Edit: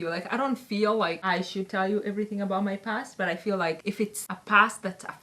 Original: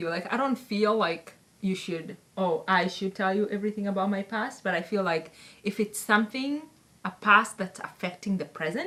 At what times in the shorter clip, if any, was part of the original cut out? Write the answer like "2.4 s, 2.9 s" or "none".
1.2 s, 4.0 s